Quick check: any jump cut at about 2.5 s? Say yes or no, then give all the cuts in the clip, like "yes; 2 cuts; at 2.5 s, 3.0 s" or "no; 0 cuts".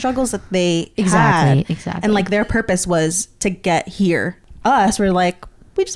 no; 1 cut; at 4.3 s